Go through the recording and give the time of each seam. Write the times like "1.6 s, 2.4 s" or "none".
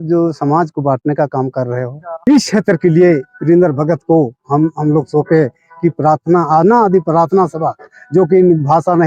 2.1 s

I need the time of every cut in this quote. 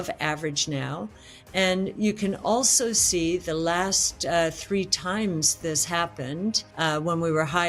none

